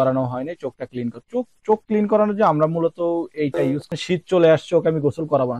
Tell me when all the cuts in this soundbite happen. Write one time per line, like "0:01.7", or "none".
0:03.9